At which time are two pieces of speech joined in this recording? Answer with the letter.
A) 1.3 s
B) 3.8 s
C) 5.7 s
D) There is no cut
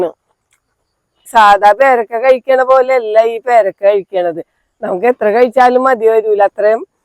A